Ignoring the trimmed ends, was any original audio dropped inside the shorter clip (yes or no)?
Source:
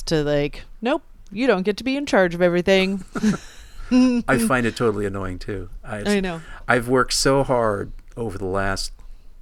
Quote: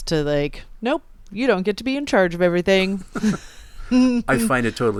no